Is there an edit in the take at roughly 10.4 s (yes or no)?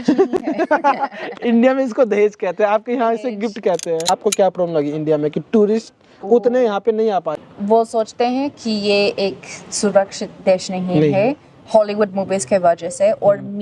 no